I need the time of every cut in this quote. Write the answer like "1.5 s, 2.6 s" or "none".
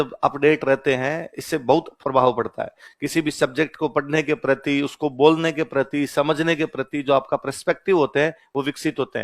1.9 s